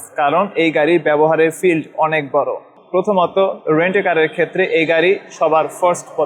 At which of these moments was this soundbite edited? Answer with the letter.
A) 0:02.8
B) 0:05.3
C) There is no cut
C